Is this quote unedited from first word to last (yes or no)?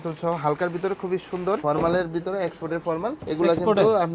no